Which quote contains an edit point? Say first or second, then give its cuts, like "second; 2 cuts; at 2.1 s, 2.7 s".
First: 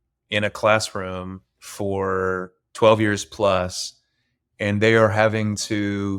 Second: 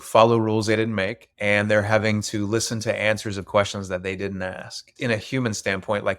second; 2 cuts; at 1.3 s, 4.9 s